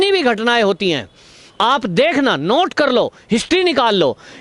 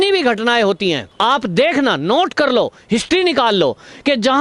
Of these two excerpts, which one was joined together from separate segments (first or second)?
second